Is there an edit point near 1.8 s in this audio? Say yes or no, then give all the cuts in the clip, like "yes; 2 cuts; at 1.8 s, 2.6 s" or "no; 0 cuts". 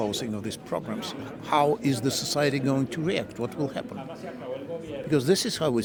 no; 0 cuts